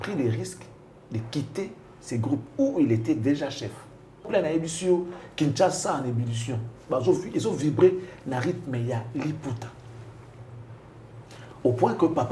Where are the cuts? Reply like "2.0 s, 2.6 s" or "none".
4.3 s